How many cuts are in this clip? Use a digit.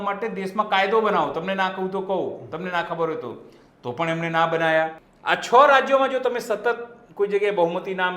1